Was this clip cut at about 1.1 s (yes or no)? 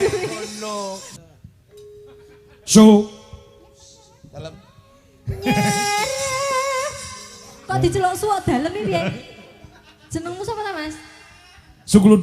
yes